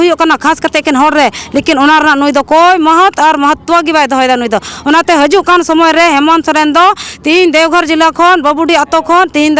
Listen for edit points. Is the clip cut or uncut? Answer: uncut